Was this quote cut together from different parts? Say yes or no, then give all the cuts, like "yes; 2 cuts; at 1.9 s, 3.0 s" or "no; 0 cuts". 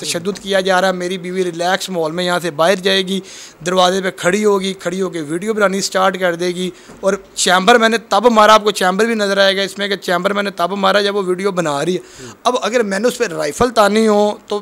no; 0 cuts